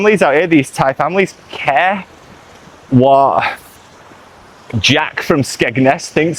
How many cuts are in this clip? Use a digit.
0